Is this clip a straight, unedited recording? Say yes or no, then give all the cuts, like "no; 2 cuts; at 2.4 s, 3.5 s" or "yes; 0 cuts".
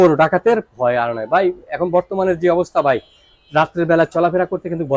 yes; 0 cuts